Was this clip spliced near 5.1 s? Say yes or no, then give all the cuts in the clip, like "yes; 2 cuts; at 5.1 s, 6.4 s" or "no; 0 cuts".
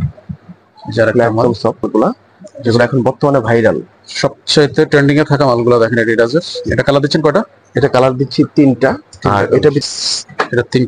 no; 2 cuts; at 1.8 s, 9.8 s